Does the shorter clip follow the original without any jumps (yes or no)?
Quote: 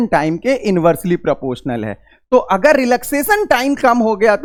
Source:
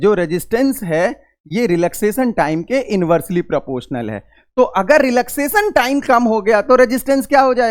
yes